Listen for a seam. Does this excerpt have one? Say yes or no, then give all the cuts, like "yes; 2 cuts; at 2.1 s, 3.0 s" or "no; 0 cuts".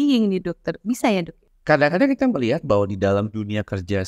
yes; 1 cut; at 1.4 s